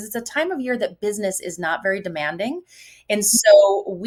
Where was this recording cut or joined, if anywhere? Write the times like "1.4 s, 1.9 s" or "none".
none